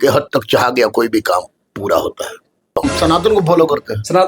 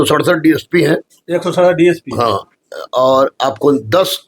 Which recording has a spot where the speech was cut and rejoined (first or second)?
first